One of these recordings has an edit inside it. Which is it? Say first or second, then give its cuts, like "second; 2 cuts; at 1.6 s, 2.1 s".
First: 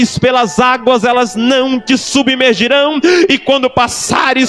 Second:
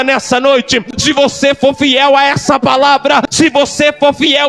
second; 2 cuts; at 0.9 s, 3.3 s